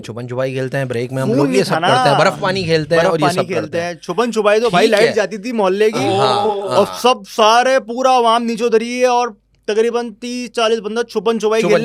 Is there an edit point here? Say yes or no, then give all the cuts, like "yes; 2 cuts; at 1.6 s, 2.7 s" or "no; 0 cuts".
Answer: no; 0 cuts